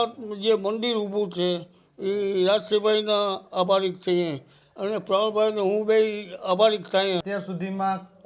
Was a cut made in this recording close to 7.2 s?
yes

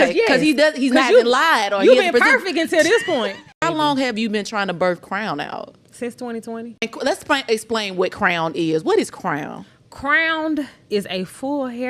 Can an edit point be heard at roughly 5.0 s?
no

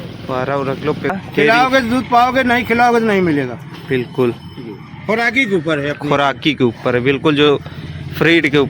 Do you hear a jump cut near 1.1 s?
yes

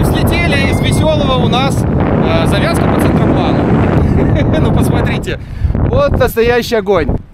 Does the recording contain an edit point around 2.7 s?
no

